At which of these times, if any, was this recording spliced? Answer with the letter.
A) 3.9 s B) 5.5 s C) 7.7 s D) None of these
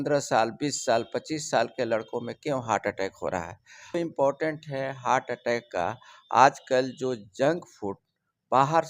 A